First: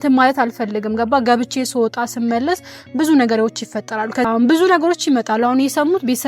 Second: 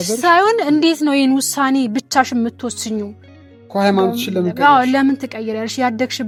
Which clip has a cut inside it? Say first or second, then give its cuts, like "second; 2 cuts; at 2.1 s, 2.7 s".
first; 1 cut; at 4.3 s